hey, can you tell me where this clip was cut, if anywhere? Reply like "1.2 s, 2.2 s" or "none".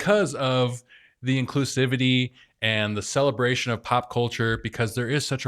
none